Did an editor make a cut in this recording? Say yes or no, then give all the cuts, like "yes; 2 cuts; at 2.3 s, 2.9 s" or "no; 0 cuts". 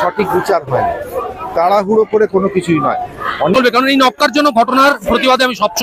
yes; 1 cut; at 3.5 s